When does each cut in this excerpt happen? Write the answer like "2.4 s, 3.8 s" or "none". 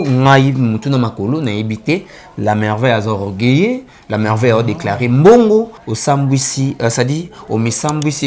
5.8 s